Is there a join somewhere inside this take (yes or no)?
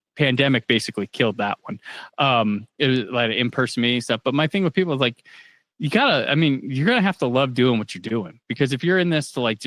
no